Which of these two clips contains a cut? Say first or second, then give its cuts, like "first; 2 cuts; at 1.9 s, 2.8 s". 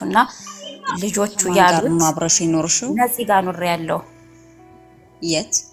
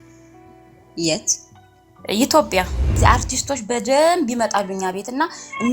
second; 1 cut; at 3.0 s